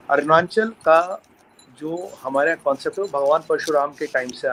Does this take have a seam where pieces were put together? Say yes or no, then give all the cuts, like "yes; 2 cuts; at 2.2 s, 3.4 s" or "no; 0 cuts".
no; 0 cuts